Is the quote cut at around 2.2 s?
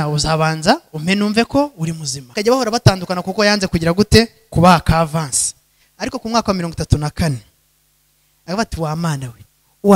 yes; 1 cut; at 2.2 s

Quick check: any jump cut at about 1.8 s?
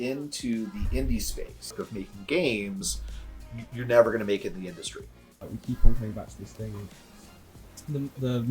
yes; 2 cuts; at 1.8 s, 5.4 s

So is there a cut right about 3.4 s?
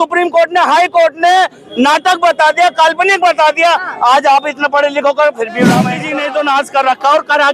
no; 1 cut; at 6.0 s

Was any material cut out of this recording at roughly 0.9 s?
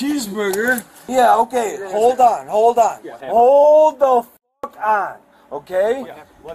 yes; 1 cut; at 0.9 s

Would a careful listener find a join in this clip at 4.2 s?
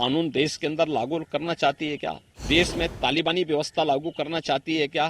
no; 1 cut; at 2.3 s

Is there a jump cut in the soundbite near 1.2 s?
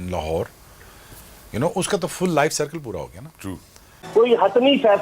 no; 1 cut; at 4.0 s

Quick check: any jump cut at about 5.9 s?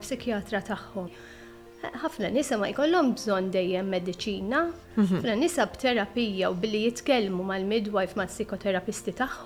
no; 1 cut; at 1.1 s

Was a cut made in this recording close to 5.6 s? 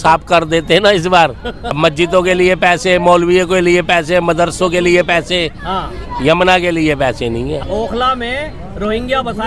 no; 2 cuts; at 1.8 s, 7.6 s

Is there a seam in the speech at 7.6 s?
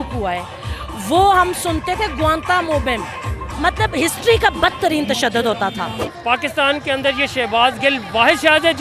no; 2 cuts; at 3.5 s, 6.0 s

